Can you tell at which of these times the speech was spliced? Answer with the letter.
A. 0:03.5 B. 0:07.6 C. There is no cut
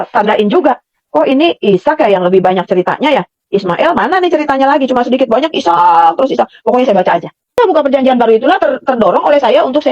B